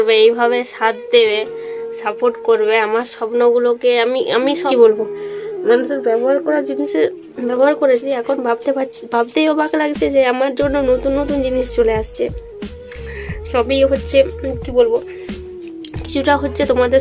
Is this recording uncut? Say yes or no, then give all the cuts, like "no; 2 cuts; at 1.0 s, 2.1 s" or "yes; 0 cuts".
no; 1 cut; at 4.6 s